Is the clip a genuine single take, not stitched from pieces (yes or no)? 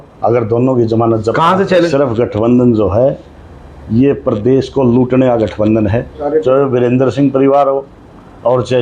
no